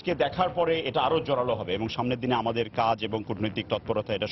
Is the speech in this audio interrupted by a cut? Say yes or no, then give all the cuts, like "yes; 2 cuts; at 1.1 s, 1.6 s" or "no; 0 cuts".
no; 0 cuts